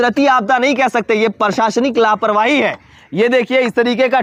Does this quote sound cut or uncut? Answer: uncut